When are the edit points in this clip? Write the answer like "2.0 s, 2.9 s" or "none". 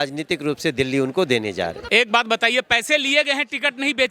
1.8 s